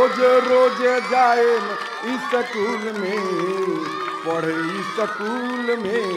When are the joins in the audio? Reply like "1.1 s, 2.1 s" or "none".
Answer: none